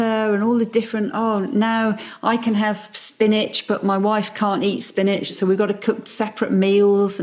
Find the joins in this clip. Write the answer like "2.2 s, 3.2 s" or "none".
5.3 s